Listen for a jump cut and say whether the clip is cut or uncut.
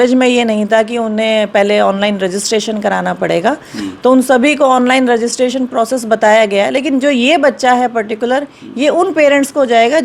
uncut